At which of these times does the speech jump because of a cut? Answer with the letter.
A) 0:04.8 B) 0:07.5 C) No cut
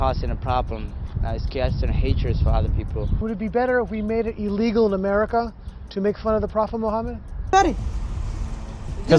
B